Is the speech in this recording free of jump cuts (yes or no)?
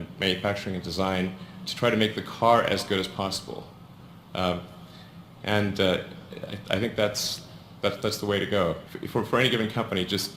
no